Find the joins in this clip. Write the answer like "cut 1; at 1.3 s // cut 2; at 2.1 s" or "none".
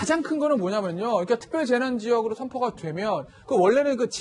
none